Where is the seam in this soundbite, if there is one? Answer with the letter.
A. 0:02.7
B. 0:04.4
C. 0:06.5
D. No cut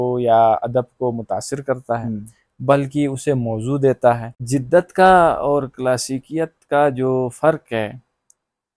B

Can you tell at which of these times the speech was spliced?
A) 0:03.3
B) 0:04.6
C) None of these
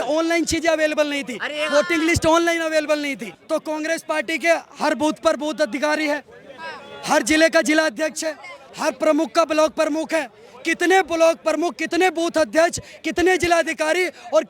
A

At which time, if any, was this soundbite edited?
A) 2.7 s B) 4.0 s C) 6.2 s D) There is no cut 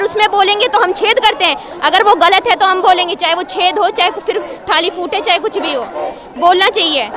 D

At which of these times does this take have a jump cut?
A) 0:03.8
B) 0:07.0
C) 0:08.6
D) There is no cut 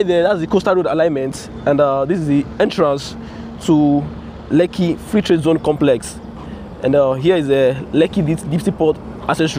D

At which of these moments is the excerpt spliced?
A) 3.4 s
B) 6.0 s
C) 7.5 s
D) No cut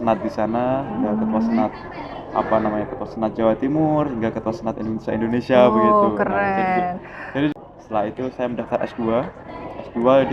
C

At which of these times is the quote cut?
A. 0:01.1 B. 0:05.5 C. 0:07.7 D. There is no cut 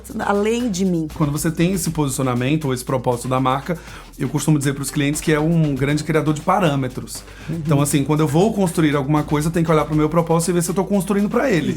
A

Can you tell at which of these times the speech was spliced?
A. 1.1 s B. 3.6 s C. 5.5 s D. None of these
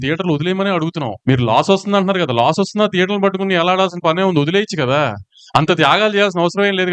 A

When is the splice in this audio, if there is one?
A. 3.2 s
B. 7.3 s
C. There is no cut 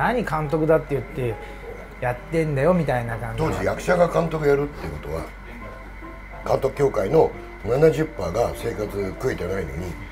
A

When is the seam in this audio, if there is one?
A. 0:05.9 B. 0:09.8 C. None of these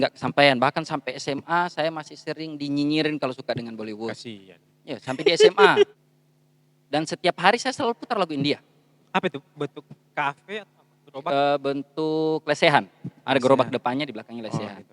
A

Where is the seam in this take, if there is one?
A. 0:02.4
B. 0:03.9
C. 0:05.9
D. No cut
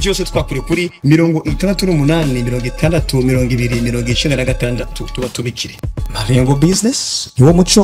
D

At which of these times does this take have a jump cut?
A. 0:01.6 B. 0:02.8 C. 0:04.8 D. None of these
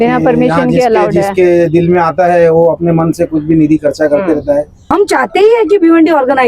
C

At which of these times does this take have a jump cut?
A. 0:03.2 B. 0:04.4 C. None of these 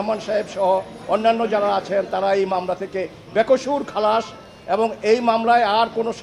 C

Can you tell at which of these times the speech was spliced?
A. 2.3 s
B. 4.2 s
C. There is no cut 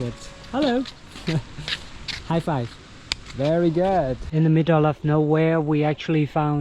B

